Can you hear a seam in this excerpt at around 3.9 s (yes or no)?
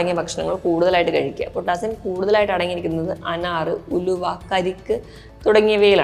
no